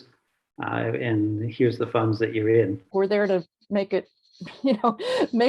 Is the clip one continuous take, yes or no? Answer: no